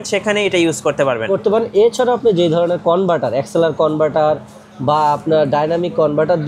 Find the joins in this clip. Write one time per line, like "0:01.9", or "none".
none